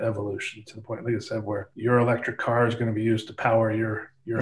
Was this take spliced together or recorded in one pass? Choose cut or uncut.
cut